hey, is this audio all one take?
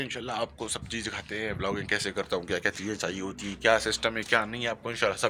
yes; 0 cuts

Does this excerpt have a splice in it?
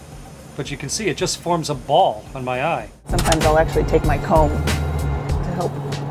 yes; 1 cut; at 3.0 s

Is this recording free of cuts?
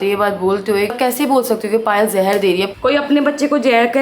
no; 2 cuts; at 0.9 s, 2.7 s

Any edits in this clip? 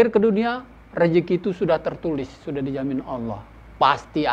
no; 0 cuts

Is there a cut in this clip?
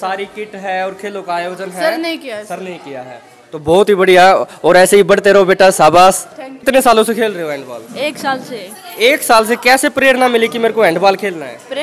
no; 0 cuts

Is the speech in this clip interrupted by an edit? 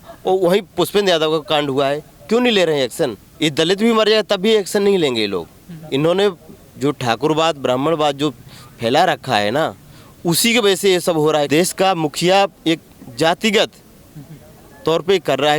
yes; 2 cuts; at 3.2 s, 11.5 s

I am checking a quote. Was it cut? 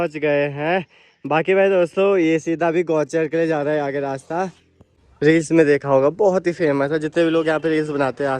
yes; 1 cut; at 4.7 s

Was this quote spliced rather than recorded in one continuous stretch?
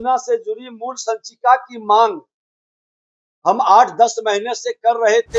no; 0 cuts

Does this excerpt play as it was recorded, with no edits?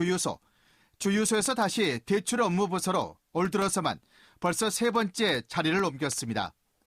yes; 0 cuts

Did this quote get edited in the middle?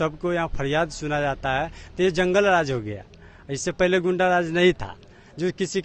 no; 0 cuts

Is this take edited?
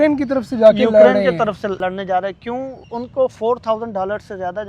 yes; 2 cuts; at 1.8 s, 2.8 s

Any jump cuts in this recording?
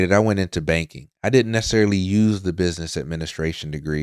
no; 0 cuts

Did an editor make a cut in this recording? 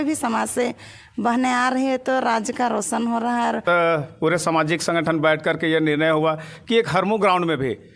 yes; 1 cut; at 3.6 s

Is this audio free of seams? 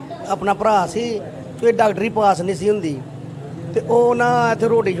yes; 0 cuts

